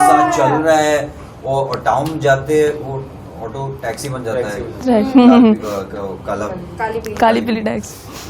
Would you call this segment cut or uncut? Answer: uncut